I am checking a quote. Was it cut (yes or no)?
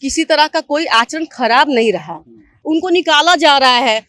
yes